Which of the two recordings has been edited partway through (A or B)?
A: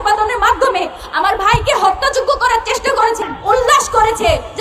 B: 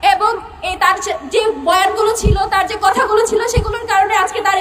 A